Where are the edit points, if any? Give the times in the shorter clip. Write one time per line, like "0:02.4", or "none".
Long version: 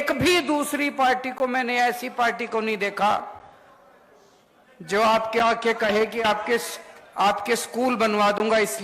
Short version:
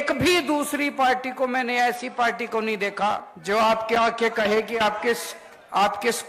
0:03.3